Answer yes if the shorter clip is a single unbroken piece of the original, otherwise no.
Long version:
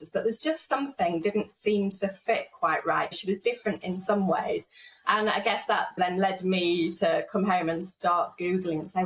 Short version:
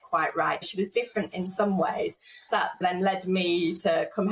no